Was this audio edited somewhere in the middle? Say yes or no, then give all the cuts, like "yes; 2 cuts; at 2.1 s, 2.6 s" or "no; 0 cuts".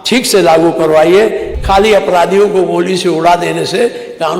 yes; 1 cut; at 1.5 s